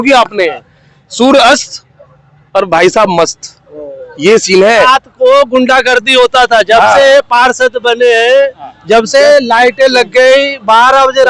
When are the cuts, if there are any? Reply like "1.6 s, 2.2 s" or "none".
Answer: 4.9 s